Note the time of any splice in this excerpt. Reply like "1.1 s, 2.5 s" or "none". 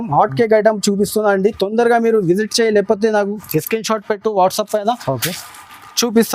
none